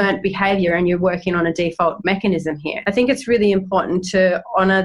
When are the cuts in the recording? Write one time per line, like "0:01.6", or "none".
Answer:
0:02.7

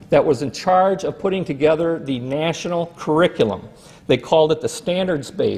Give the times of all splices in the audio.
none

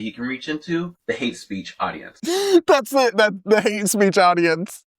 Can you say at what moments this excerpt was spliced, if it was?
0:02.0

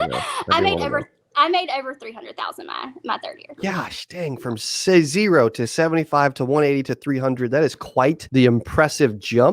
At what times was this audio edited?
0:08.2

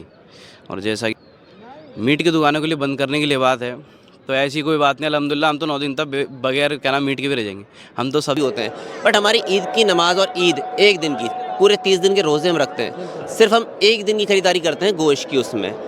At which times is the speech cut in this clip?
0:01.1
0:08.4

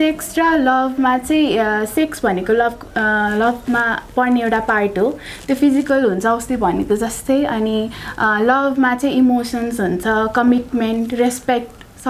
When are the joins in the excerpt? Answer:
none

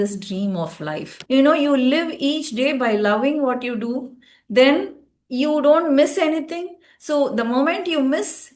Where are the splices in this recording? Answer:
0:01.1

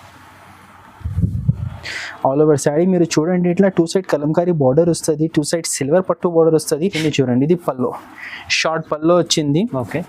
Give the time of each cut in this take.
0:07.0

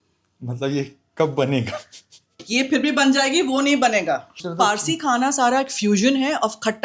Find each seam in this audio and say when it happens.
0:04.4

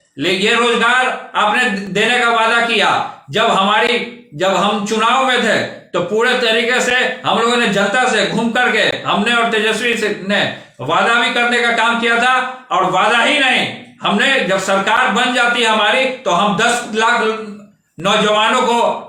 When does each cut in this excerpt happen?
none

